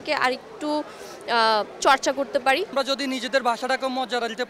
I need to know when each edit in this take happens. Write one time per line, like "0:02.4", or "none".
0:02.7